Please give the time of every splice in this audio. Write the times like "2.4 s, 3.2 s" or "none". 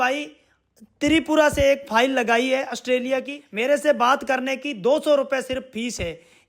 3.4 s